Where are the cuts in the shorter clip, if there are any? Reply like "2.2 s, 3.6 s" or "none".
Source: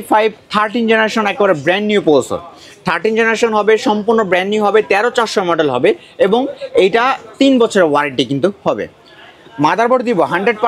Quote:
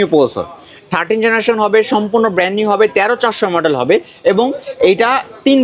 none